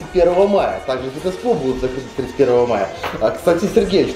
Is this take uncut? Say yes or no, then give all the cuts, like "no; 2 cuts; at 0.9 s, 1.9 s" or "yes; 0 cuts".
yes; 0 cuts